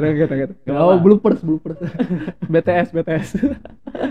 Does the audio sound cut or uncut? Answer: uncut